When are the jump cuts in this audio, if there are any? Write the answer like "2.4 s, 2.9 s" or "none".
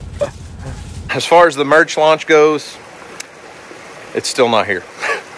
1.2 s